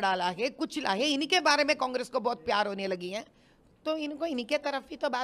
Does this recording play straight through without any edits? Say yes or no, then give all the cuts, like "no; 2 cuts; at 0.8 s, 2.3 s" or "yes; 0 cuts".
yes; 0 cuts